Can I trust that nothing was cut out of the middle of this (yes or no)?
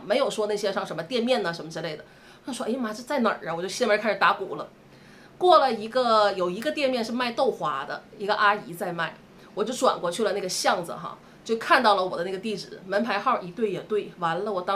yes